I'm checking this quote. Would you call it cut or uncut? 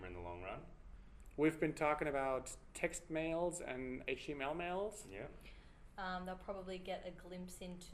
uncut